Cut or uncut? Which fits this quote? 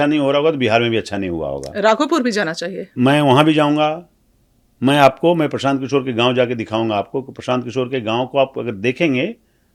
uncut